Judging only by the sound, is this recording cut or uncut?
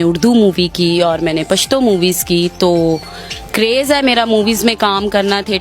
uncut